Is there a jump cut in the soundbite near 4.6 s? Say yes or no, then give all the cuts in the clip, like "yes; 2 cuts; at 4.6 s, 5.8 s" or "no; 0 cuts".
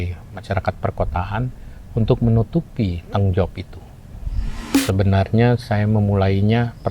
yes; 1 cut; at 4.6 s